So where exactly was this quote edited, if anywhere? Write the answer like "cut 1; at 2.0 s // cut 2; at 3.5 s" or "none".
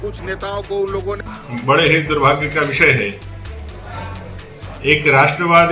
cut 1; at 1.3 s